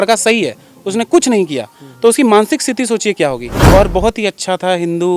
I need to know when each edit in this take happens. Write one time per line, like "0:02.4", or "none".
0:03.5